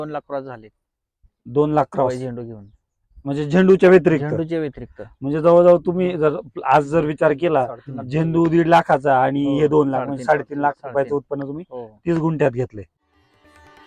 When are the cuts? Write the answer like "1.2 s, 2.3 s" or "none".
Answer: 12.8 s